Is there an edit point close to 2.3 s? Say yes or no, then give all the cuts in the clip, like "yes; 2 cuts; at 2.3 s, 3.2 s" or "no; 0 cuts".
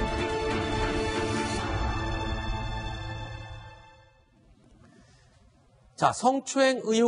yes; 1 cut; at 2.3 s